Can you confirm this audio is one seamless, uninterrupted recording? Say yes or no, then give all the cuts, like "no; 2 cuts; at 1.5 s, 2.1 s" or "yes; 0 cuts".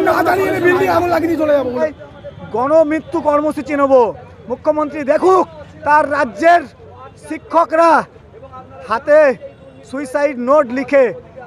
no; 1 cut; at 2.0 s